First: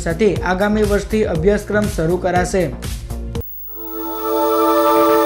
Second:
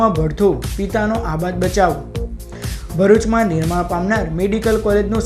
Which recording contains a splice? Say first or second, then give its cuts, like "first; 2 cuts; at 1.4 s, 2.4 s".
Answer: first; 1 cut; at 3.5 s